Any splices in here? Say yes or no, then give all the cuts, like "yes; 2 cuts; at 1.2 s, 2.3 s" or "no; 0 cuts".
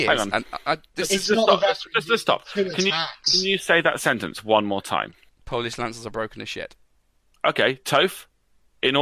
no; 0 cuts